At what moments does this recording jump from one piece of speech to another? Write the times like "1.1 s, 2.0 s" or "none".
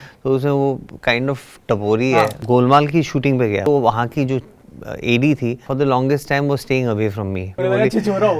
2.4 s, 3.6 s, 5.6 s, 7.6 s